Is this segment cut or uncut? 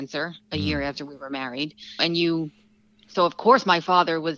uncut